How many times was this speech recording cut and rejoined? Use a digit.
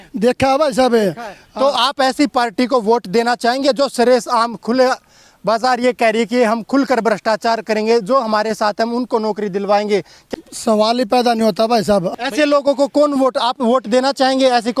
2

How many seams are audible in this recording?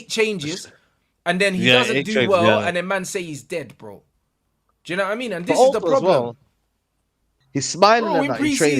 1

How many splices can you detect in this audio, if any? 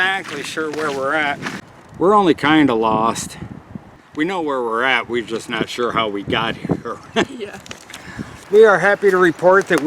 3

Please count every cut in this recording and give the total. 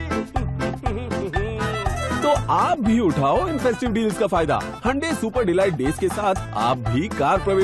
0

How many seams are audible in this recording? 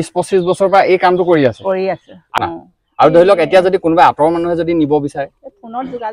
1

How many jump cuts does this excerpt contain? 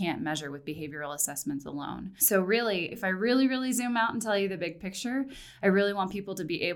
2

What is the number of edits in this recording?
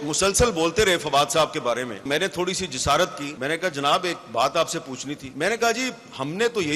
3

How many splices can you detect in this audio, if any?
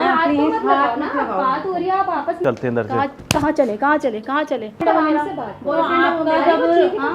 2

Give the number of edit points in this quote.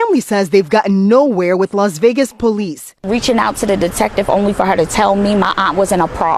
0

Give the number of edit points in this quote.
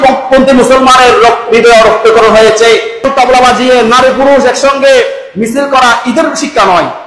1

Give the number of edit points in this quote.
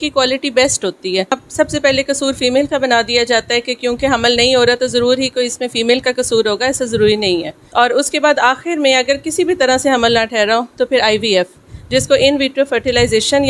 2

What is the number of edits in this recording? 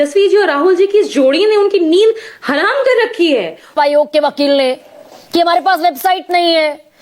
1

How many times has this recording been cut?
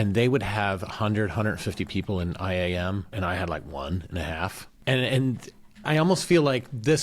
3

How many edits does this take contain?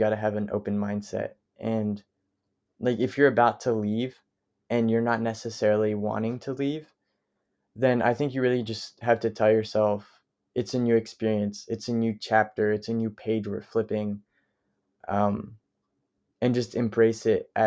0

